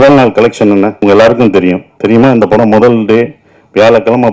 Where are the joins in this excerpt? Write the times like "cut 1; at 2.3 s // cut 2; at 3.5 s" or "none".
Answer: cut 1; at 0.9 s // cut 2; at 1.9 s